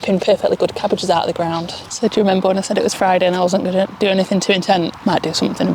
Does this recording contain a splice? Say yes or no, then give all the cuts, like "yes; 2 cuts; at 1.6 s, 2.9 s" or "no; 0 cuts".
yes; 2 cuts; at 1.8 s, 4.9 s